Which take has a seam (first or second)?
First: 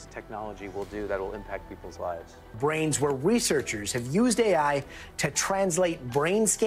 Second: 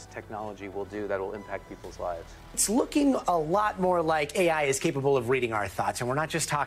second